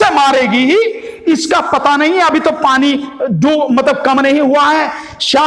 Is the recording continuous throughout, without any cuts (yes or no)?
yes